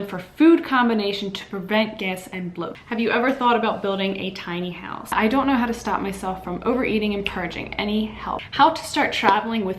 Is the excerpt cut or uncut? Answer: cut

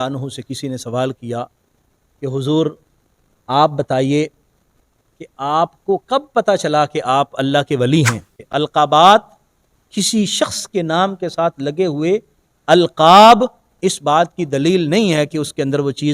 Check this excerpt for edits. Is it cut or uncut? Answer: cut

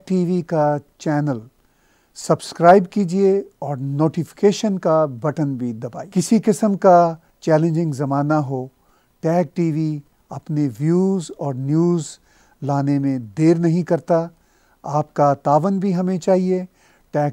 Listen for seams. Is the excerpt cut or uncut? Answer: uncut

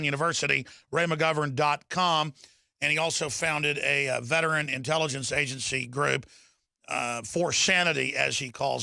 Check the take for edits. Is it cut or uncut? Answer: uncut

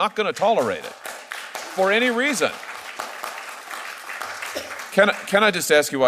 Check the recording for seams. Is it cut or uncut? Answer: uncut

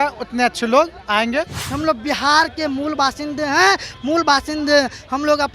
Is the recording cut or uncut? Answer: cut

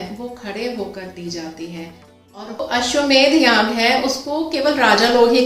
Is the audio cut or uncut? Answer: cut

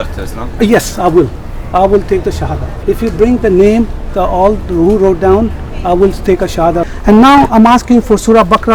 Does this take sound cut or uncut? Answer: cut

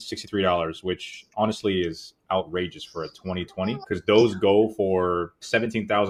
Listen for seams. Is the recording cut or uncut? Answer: uncut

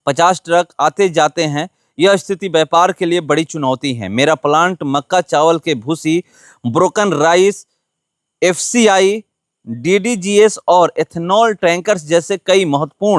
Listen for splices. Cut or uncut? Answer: uncut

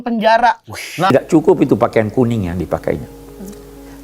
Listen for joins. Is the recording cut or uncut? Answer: cut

